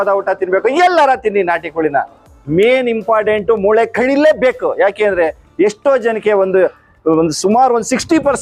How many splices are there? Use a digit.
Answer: 0